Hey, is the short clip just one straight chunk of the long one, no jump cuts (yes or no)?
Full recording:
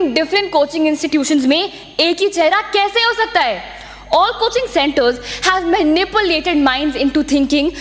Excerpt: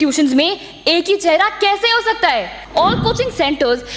no